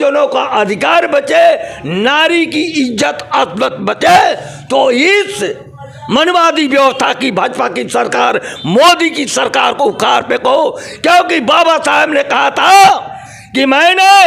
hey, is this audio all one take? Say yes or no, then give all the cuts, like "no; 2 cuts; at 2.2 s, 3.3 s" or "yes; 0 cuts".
yes; 0 cuts